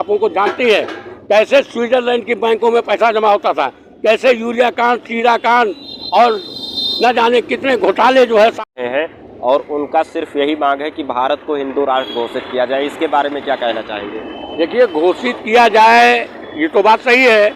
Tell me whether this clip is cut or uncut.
cut